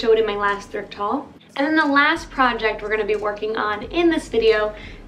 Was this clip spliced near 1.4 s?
yes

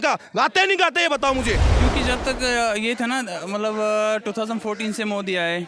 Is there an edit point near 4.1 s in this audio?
no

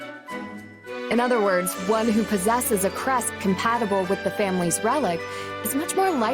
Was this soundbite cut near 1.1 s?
yes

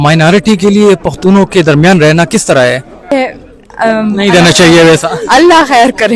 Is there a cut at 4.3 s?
no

